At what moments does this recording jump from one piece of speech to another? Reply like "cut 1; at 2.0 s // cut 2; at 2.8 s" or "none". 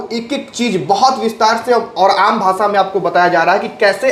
none